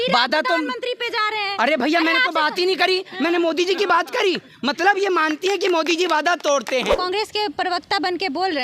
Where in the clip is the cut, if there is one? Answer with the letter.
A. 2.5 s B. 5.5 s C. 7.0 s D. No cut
C